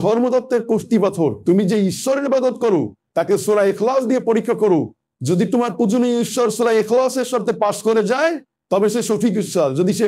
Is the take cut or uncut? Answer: uncut